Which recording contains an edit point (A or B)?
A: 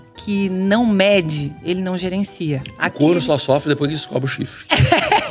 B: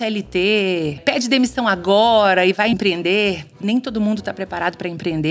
B